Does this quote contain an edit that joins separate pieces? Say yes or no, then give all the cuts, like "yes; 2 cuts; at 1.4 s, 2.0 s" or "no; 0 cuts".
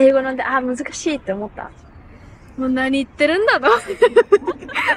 no; 0 cuts